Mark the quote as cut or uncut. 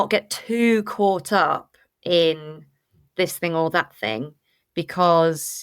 uncut